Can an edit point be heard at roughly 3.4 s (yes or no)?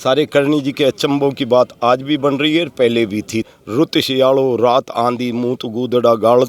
yes